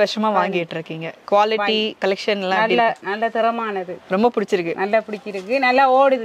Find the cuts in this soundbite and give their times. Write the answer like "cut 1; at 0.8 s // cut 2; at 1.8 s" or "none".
none